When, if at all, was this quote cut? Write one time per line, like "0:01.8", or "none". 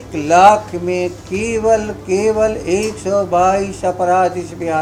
none